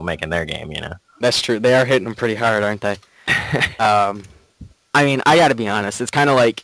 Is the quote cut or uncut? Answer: cut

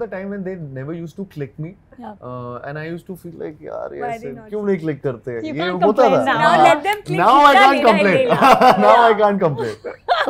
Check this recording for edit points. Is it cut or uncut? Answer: uncut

